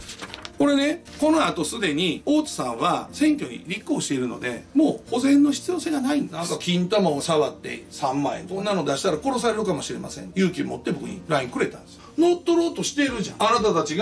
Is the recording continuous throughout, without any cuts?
no; 2 cuts; at 6.5 s, 8.6 s

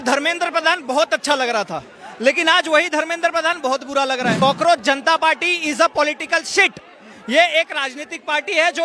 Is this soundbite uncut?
no; 1 cut; at 4.3 s

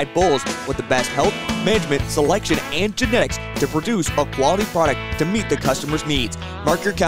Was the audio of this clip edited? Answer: no; 0 cuts

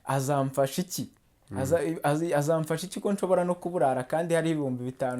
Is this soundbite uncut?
yes; 0 cuts

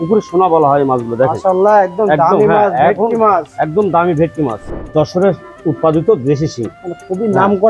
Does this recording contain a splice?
yes; 1 cut; at 4.9 s

